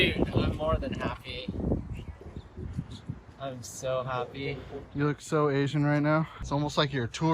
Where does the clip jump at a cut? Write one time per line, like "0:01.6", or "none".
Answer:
0:02.2
0:06.4